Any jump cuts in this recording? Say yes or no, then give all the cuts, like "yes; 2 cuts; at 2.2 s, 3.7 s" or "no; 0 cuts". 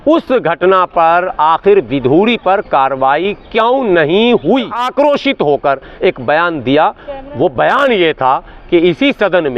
yes; 1 cut; at 4.8 s